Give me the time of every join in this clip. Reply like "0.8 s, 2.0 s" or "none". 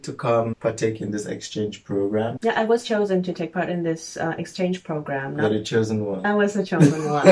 none